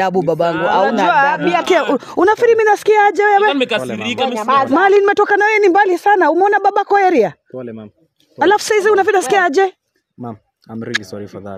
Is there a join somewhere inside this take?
yes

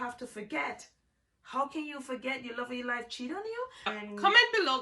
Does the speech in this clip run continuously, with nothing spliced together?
no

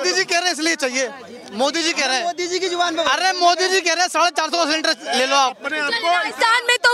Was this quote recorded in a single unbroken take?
yes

